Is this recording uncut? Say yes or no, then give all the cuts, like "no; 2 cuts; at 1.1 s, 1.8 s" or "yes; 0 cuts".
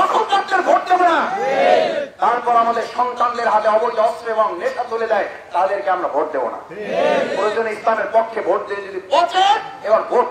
yes; 0 cuts